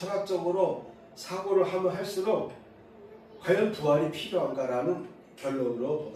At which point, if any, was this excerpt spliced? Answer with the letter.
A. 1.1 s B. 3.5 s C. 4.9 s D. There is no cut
D